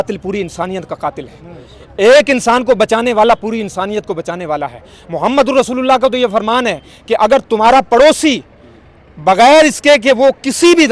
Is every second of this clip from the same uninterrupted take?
yes; 0 cuts

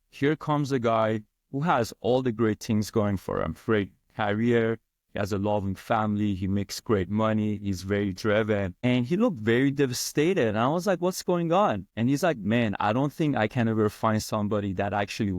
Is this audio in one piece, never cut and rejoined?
yes; 0 cuts

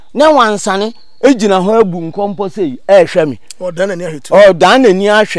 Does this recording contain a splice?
no; 0 cuts

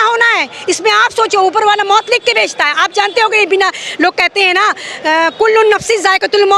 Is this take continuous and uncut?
yes; 0 cuts

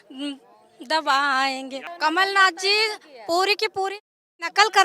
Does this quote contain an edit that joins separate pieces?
yes; 1 cut; at 1.8 s

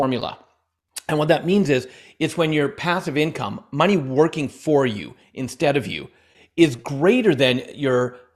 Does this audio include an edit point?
no; 0 cuts

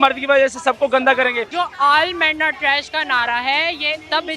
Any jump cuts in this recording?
yes; 1 cut; at 1.4 s

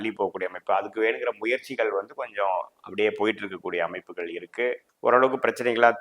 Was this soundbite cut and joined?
yes; 1 cut; at 4.9 s

